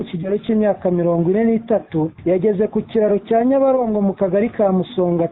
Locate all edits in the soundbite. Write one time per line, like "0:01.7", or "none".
0:02.2